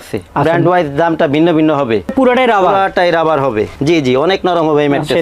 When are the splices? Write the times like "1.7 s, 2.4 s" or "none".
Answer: 2.1 s, 3.8 s